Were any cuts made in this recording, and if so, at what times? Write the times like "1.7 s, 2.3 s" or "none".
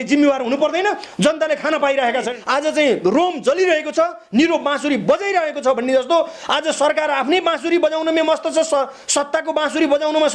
2.4 s